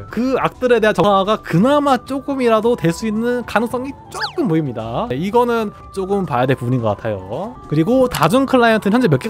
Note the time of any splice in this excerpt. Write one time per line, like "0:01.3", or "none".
0:01.0
0:05.1